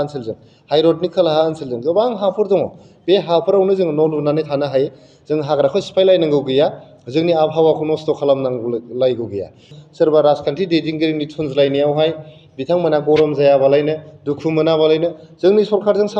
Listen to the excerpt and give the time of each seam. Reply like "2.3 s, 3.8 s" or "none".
9.7 s

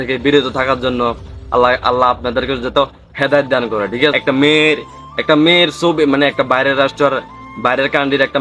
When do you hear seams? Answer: 4.2 s

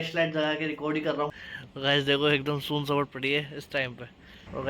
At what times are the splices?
1.4 s

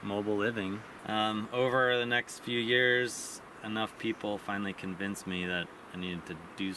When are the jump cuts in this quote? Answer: 0.9 s

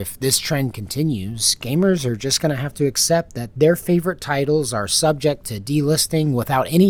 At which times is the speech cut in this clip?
none

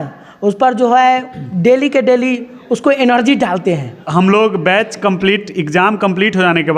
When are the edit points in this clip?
3.9 s

